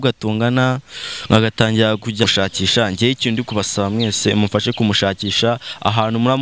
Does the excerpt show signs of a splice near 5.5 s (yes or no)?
no